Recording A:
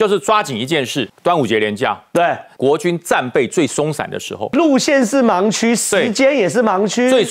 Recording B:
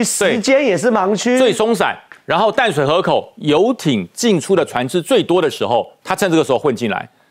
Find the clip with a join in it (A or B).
A